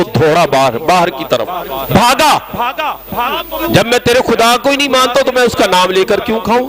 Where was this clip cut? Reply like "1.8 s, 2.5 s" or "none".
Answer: 3.3 s